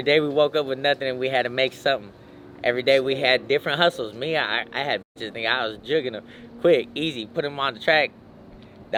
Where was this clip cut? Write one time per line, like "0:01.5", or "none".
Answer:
none